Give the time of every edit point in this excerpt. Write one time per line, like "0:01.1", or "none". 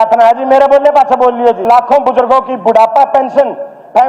0:01.6